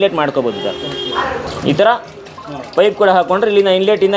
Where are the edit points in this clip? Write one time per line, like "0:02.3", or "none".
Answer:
none